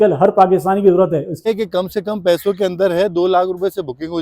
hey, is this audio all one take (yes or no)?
no